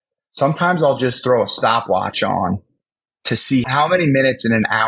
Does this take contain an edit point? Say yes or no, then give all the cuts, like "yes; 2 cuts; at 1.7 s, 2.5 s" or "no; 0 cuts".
yes; 1 cut; at 3.7 s